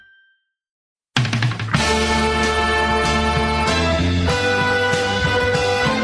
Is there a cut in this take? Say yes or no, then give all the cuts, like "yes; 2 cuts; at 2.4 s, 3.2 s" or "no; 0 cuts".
yes; 1 cut; at 0.9 s